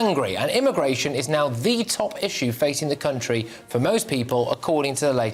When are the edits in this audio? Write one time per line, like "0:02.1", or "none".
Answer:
none